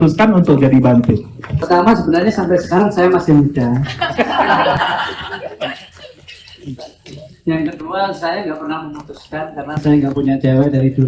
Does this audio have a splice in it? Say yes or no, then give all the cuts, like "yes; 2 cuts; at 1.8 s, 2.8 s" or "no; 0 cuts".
yes; 1 cut; at 1.6 s